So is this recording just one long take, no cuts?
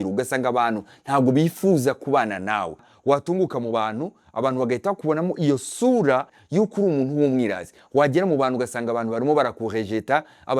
no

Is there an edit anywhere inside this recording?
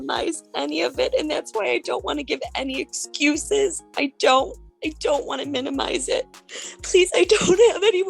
yes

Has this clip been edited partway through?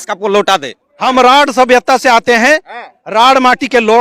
yes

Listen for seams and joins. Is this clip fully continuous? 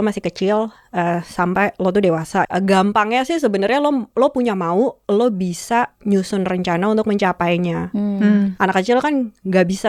no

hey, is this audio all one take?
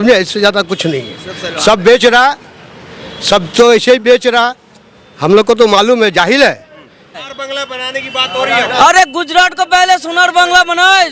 no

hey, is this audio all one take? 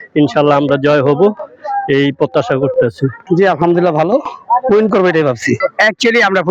yes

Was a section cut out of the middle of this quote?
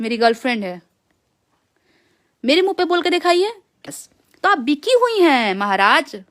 yes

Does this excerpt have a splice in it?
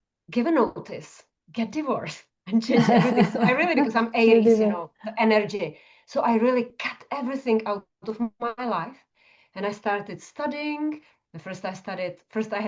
no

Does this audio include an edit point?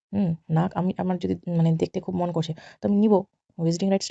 no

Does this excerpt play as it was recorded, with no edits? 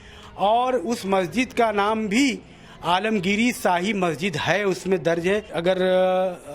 no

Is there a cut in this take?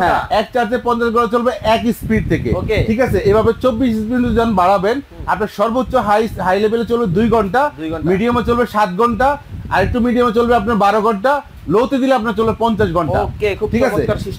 no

